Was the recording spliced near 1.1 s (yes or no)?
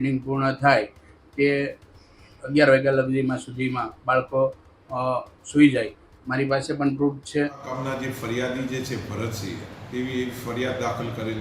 no